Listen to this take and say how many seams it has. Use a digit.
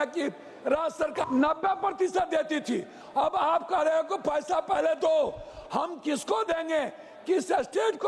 1